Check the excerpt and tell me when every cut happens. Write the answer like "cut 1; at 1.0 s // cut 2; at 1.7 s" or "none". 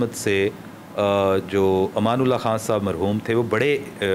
none